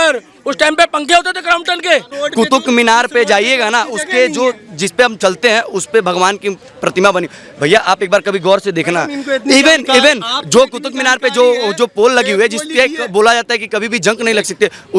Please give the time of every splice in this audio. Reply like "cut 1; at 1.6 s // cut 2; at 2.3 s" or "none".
cut 1; at 2.1 s